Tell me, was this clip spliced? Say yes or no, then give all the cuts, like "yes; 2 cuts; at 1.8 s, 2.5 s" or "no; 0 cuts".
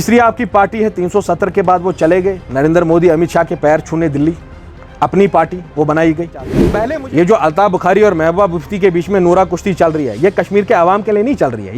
yes; 1 cut; at 6.6 s